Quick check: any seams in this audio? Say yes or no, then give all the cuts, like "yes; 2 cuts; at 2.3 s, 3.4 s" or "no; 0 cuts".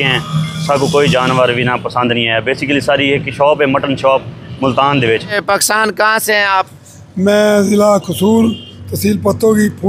yes; 1 cut; at 5.3 s